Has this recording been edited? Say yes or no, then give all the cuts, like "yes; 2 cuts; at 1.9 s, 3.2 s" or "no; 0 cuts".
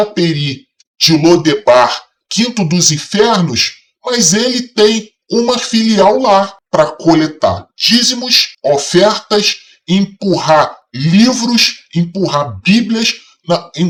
no; 0 cuts